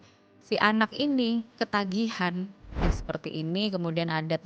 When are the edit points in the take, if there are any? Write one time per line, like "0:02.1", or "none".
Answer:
0:02.9